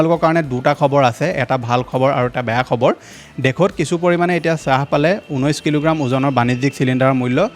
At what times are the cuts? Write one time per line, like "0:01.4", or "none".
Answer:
none